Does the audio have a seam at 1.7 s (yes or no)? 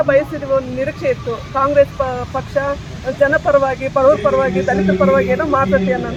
no